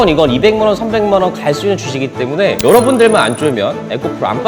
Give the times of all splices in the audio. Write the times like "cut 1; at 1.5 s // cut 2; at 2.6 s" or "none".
none

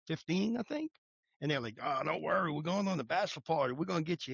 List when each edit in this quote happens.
none

